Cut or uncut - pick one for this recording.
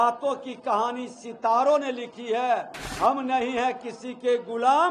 cut